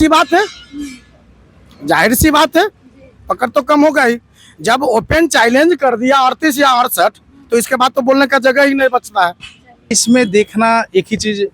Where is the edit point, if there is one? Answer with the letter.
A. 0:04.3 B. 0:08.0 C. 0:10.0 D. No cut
C